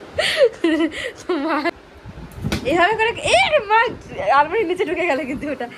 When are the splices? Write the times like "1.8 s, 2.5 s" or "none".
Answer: 1.7 s